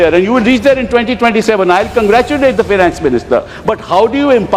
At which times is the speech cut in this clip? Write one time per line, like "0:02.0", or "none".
none

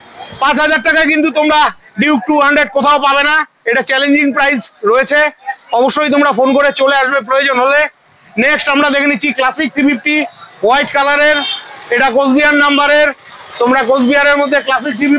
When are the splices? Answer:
none

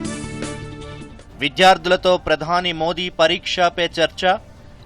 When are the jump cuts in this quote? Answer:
0:01.2

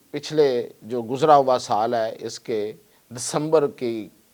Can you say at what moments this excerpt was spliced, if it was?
none

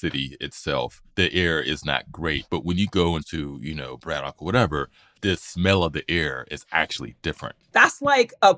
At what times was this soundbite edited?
0:01.0
0:02.4
0:03.3

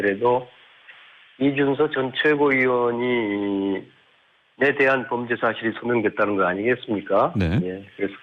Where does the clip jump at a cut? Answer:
0:01.4

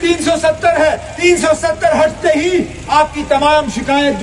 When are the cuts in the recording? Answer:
0:01.2
0:02.8

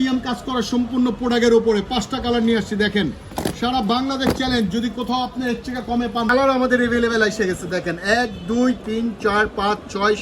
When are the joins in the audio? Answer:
0:06.3

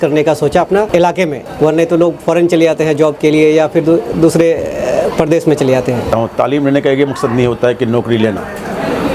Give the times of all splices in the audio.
0:01.1
0:06.1

